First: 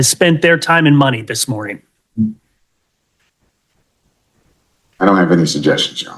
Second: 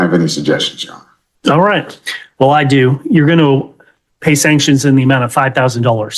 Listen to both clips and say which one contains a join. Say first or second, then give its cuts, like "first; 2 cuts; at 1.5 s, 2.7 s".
first; 1 cut; at 3.9 s